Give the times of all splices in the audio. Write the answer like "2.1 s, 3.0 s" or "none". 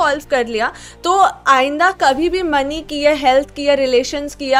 none